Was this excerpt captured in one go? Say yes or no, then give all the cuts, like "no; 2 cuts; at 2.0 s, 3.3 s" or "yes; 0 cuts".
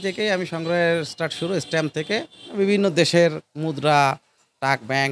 no; 1 cut; at 2.4 s